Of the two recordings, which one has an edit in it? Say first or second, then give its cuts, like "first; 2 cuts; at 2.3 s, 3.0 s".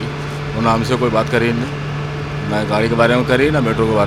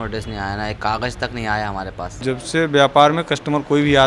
second; 1 cut; at 2.1 s